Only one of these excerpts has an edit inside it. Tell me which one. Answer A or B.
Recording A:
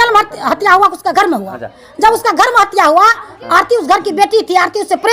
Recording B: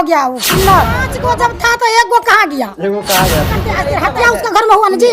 B